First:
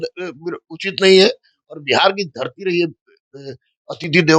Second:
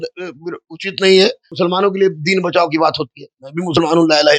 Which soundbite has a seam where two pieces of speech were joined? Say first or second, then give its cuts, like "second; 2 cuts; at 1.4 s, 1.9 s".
second; 1 cut; at 1.4 s